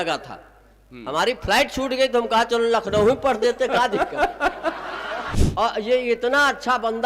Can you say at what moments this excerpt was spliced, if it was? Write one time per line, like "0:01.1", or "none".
0:05.4